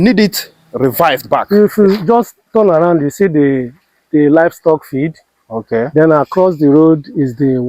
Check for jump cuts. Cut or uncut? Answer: uncut